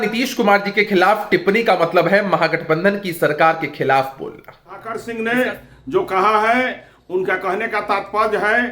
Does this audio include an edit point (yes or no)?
yes